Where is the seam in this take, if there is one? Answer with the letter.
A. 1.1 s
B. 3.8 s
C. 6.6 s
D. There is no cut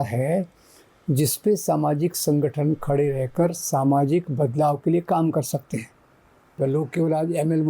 C